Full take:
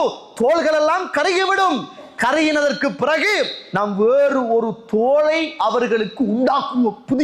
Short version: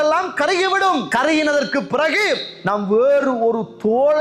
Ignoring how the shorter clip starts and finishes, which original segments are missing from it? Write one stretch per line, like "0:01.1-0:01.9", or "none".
0:01.8-0:02.2